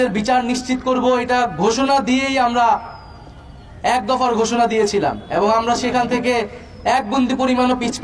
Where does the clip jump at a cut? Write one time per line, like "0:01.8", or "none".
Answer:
none